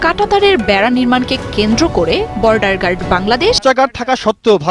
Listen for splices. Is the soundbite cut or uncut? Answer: cut